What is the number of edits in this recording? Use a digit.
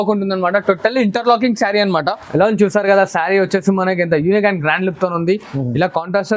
1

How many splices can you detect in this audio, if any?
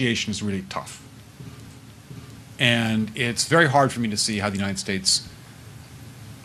1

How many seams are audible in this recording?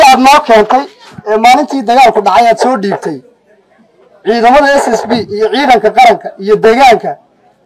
0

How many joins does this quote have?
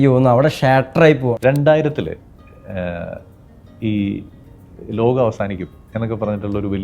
1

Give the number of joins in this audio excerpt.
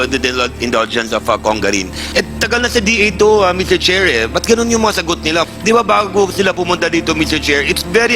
2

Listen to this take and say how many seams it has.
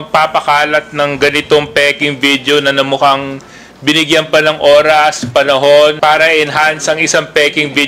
1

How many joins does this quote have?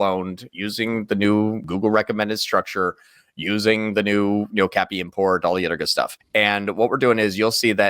2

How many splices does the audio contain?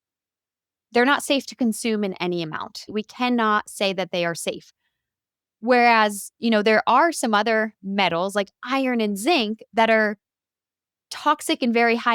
1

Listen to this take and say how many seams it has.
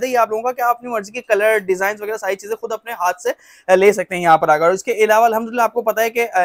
0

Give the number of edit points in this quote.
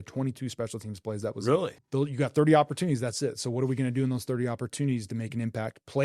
1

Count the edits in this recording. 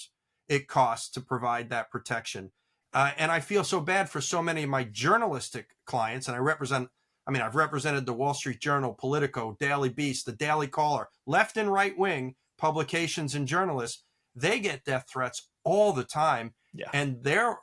1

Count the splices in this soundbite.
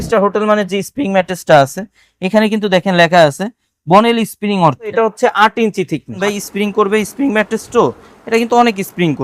2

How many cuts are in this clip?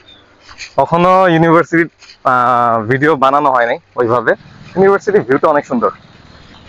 1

